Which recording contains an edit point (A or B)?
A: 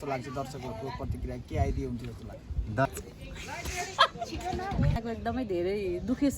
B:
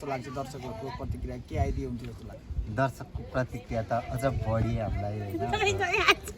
A